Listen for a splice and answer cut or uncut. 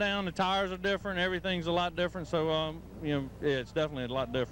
uncut